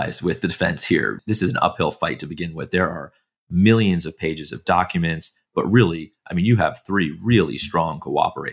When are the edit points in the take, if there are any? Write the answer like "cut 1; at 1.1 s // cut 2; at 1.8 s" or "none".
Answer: cut 1; at 1.2 s